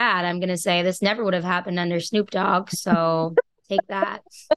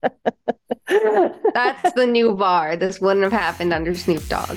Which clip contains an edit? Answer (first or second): first